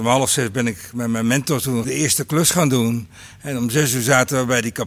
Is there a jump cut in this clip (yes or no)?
yes